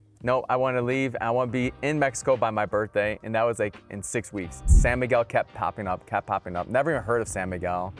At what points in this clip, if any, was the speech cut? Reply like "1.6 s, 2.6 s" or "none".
4.6 s